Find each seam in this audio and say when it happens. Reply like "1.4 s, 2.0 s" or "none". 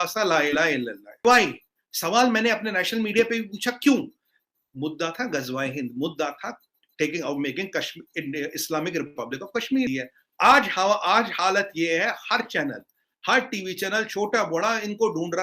1.2 s, 9.9 s